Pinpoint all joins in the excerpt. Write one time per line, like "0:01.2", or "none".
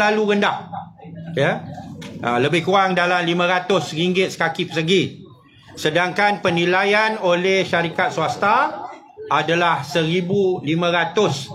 none